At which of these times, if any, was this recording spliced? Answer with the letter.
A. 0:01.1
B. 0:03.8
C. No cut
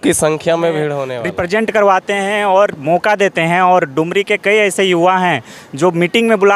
A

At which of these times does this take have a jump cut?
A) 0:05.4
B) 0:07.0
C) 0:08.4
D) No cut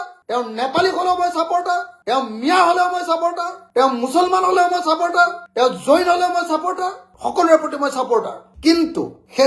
D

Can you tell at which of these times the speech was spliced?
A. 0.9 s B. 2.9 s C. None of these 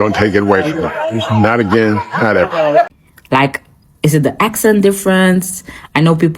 B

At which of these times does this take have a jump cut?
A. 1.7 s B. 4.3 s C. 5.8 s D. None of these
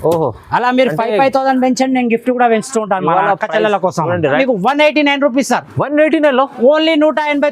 B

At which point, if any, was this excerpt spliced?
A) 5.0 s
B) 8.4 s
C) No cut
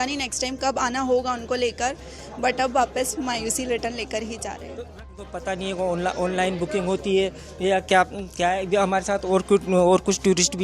A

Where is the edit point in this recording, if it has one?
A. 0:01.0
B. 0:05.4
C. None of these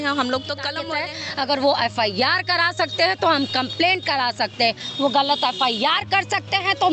A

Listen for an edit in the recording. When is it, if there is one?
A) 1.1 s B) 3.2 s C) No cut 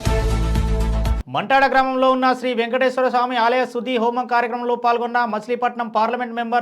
A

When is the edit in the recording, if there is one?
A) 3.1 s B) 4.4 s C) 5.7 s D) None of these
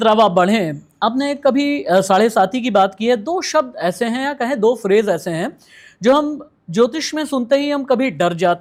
D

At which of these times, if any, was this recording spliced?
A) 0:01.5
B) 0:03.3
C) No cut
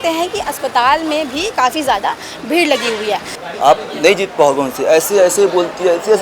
B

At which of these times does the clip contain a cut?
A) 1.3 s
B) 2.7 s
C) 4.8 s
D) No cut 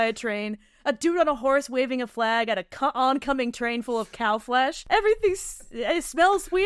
C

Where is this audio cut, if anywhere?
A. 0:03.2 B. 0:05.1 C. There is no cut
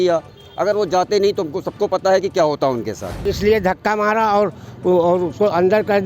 A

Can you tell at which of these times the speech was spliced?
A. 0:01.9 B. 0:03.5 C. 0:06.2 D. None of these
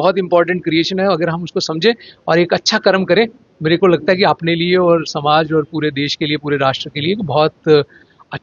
D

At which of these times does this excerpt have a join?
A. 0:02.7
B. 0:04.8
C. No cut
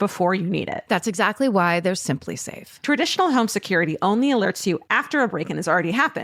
C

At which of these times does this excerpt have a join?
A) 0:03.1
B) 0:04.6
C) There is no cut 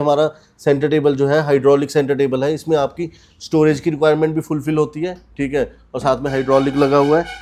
C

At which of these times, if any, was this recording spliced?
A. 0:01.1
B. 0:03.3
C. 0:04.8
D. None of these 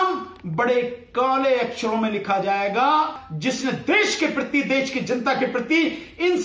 B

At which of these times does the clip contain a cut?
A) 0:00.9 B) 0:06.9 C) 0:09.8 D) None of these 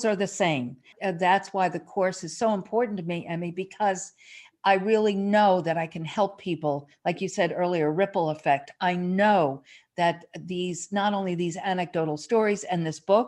A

